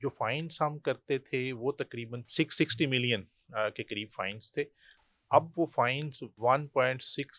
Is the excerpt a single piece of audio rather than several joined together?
no; 1 cut; at 6.3 s

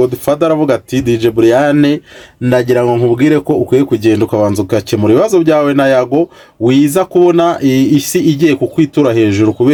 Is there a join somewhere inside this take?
no; 0 cuts

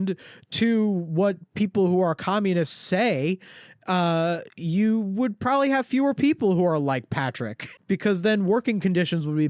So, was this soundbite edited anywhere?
no; 0 cuts

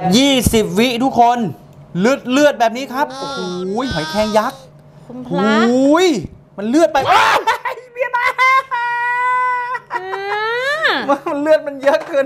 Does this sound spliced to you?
no; 0 cuts

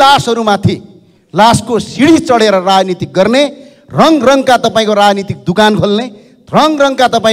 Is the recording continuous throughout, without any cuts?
yes; 0 cuts

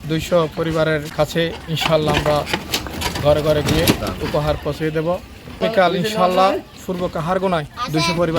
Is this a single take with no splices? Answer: no; 2 cuts; at 1.1 s, 5.6 s

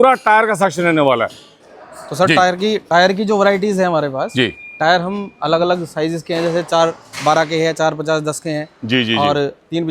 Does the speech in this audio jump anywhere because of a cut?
no; 0 cuts

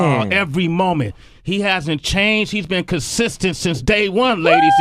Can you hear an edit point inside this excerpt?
yes; 1 cut; at 2.8 s

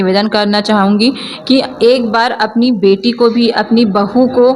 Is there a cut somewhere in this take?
no; 0 cuts

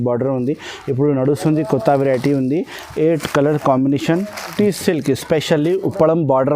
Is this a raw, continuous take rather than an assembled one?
no; 1 cut; at 4.5 s

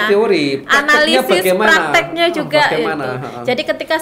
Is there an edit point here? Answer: no; 0 cuts

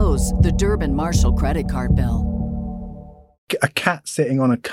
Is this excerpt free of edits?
no; 1 cut; at 3.5 s

